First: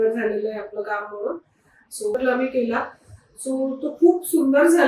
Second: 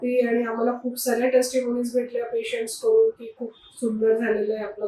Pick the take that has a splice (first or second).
first